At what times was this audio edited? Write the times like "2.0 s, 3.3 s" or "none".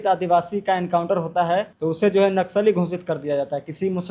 1.7 s